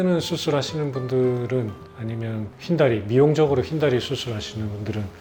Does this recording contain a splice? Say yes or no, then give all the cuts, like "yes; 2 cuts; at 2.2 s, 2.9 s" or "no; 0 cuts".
no; 0 cuts